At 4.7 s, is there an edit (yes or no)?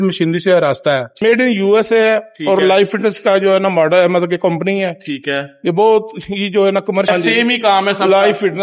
no